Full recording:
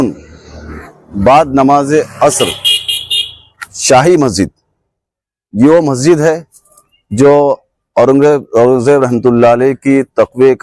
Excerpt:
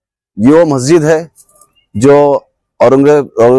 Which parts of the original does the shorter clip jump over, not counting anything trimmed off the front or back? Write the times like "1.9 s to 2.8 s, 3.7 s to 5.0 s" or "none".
none